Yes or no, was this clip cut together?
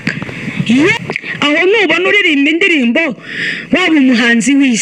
yes